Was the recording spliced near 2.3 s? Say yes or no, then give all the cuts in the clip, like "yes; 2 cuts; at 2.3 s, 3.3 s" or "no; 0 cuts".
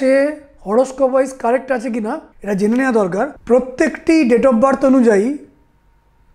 yes; 2 cuts; at 2.3 s, 3.4 s